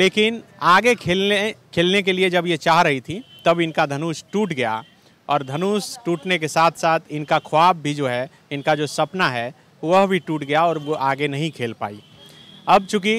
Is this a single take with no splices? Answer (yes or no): yes